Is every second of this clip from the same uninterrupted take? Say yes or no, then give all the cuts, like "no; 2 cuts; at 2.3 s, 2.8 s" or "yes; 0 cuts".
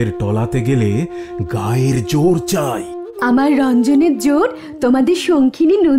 yes; 0 cuts